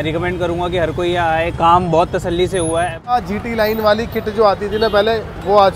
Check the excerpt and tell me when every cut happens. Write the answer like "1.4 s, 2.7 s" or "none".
3.2 s